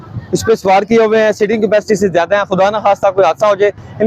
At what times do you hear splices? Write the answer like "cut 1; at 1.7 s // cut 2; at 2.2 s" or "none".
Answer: none